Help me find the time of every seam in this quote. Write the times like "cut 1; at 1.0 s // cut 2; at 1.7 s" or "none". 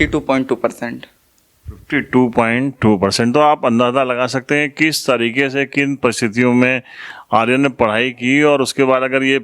none